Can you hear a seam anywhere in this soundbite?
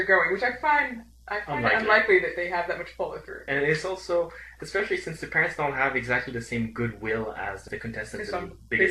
no; 0 cuts

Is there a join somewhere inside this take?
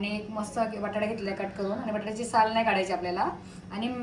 no; 0 cuts

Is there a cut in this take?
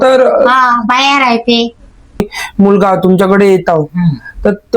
yes; 1 cut; at 2.4 s

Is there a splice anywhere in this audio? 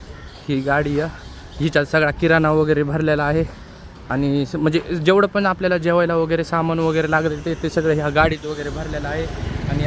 no; 0 cuts

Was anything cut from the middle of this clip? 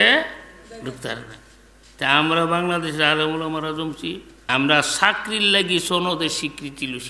yes; 1 cut; at 4.3 s

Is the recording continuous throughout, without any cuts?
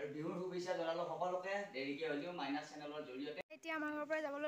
no; 1 cut; at 3.4 s

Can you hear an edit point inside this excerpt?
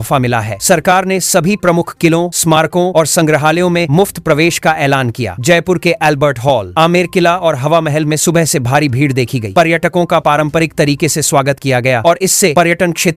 no; 0 cuts

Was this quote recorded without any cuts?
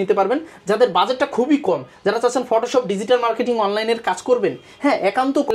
yes; 0 cuts

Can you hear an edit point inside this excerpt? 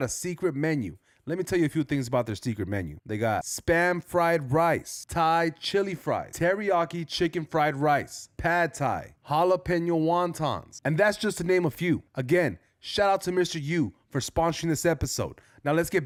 no; 0 cuts

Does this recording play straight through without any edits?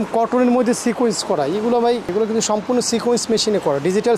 no; 1 cut; at 2.1 s

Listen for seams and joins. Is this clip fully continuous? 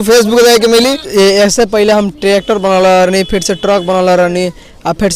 no; 1 cut; at 1.0 s

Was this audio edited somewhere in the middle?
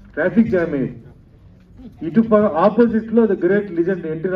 no; 0 cuts

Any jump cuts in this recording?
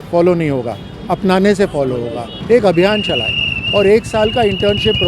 yes; 1 cut; at 2.3 s

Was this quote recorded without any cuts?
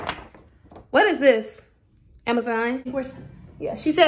no; 1 cut; at 2.9 s

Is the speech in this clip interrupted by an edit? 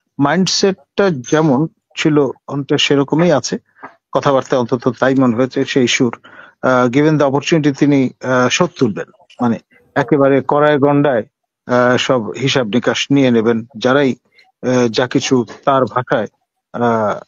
no; 0 cuts

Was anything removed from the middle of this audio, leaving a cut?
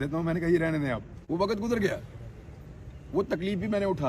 yes; 1 cut; at 1.1 s

